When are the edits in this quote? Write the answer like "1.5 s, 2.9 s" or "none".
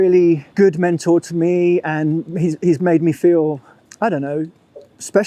none